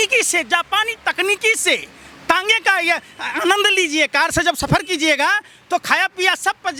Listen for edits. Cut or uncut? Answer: uncut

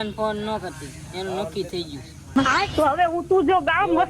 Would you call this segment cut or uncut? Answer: cut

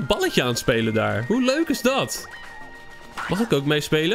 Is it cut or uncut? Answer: cut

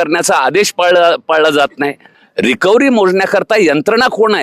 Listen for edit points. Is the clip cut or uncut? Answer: cut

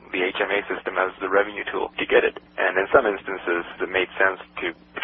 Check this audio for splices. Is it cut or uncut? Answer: cut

